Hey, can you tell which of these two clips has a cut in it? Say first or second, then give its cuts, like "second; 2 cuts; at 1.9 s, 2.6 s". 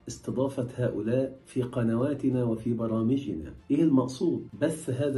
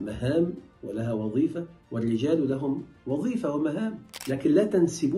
second; 1 cut; at 4.2 s